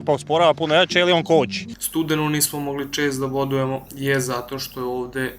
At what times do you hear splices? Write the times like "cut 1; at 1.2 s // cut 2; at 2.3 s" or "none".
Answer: cut 1; at 1.7 s